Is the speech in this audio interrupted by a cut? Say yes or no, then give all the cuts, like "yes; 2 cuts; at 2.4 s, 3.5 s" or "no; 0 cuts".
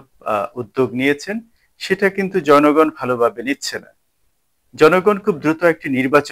no; 0 cuts